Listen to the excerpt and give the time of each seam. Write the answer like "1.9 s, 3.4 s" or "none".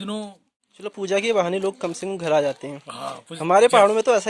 0.9 s